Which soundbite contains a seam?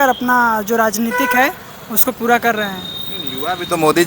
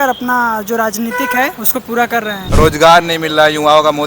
second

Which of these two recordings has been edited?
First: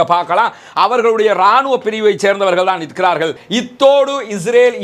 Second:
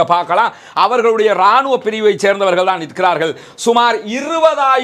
first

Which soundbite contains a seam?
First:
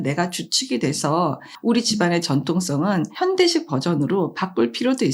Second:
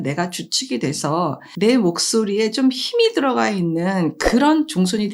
second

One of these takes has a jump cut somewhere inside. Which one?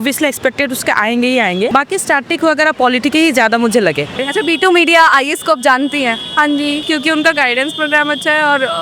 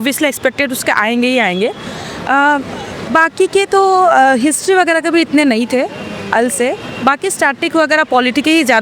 first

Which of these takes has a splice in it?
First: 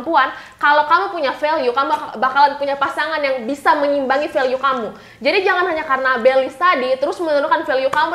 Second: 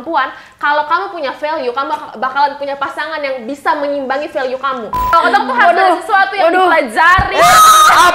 second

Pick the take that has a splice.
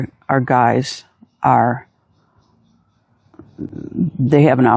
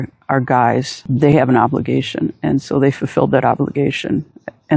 second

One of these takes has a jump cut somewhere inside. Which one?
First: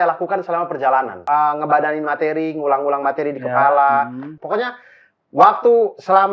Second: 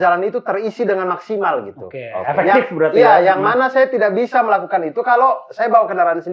first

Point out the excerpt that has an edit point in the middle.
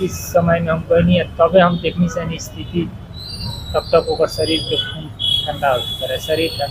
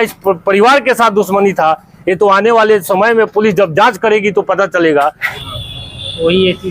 second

